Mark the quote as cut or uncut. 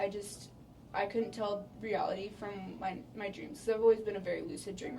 cut